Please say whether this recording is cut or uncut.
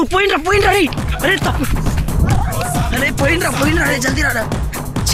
uncut